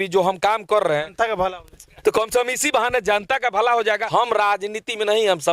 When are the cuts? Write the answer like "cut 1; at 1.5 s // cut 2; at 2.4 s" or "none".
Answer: cut 1; at 4.0 s